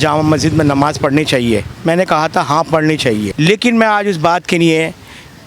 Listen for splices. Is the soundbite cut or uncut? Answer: cut